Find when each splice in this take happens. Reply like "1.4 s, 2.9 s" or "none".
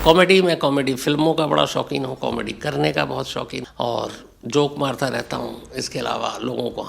3.6 s